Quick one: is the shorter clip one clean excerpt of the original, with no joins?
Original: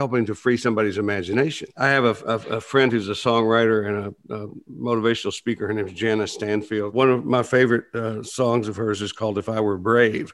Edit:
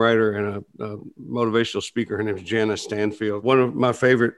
yes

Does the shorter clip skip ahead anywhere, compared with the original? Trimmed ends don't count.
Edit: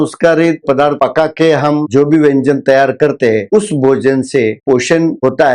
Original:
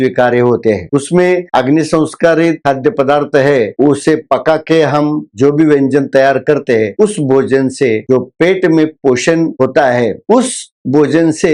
yes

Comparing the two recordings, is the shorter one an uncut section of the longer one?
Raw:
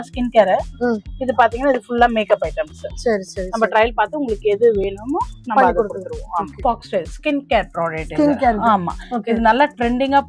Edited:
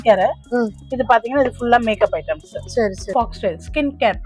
no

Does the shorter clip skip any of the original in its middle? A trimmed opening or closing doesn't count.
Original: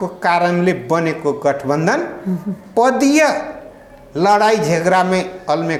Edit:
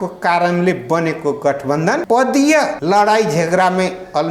yes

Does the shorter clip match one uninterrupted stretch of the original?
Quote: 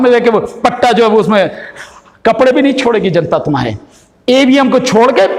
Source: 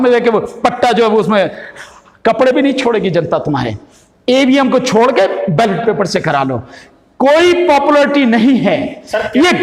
yes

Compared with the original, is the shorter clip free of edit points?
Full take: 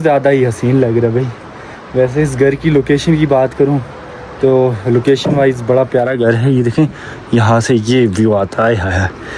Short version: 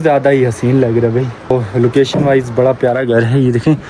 no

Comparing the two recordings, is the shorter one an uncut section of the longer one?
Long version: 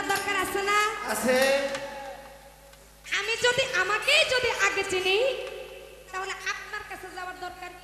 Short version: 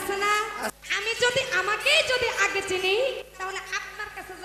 no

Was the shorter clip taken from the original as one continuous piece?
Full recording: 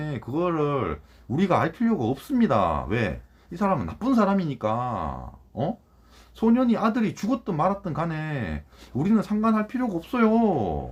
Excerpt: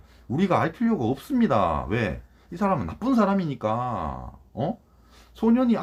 yes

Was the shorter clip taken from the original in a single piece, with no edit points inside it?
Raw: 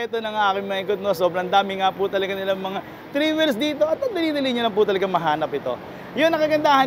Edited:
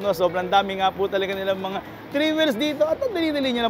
yes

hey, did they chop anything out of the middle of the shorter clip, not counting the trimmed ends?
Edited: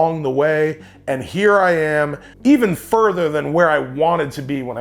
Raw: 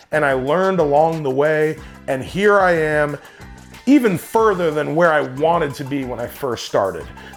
yes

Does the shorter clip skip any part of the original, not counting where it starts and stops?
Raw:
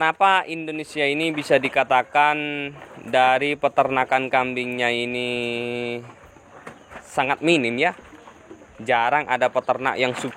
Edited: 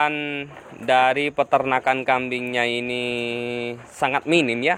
yes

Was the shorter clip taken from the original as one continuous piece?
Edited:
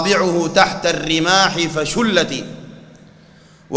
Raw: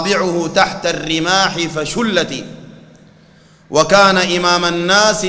yes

